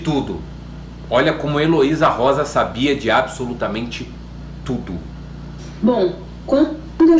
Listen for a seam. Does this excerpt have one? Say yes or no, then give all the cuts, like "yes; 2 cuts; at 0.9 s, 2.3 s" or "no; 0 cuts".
no; 0 cuts